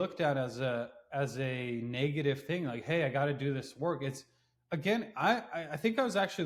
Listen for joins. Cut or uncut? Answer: uncut